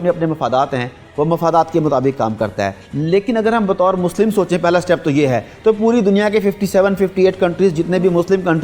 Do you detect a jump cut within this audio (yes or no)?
no